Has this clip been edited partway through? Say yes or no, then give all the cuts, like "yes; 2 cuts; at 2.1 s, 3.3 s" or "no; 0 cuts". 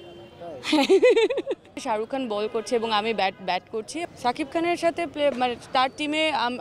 yes; 2 cuts; at 1.7 s, 4.0 s